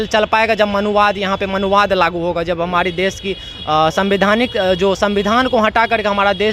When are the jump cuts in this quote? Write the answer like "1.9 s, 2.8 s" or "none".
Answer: none